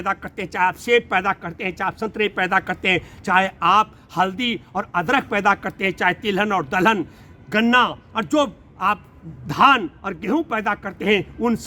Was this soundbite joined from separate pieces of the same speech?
no; 0 cuts

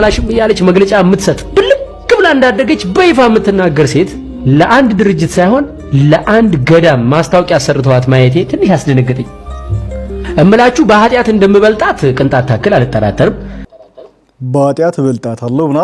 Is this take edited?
no; 0 cuts

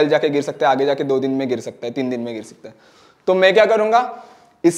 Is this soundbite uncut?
yes; 0 cuts

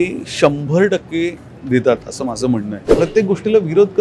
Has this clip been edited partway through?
yes; 1 cut; at 2.8 s

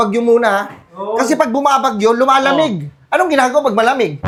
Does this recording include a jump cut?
no; 0 cuts

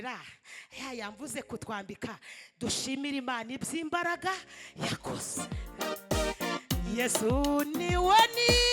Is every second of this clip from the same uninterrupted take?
no; 1 cut; at 5.3 s

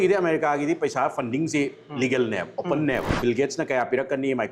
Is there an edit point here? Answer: yes; 1 cut; at 3.1 s

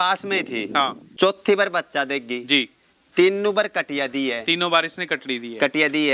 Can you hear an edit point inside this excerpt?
yes; 1 cut; at 1.0 s

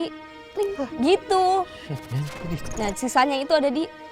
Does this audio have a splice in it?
yes; 1 cut; at 2.5 s

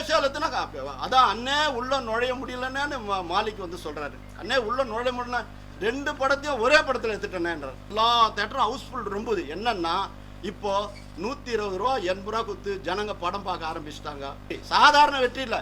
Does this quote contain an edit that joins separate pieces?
yes; 2 cuts; at 7.9 s, 14.5 s

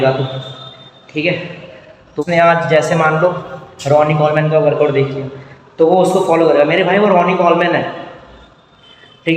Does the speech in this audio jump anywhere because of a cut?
yes; 1 cut; at 2.2 s

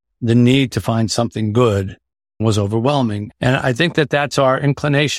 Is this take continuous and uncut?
no; 2 cuts; at 2.4 s, 3.2 s

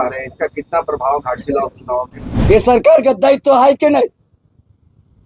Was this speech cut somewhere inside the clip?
yes; 1 cut; at 2.2 s

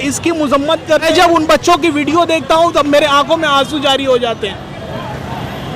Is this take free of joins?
no; 1 cut; at 1.1 s

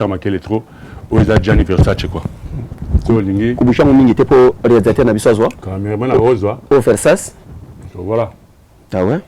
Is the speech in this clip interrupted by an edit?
no; 0 cuts

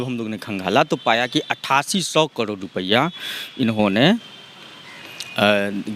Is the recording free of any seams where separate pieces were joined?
yes; 0 cuts

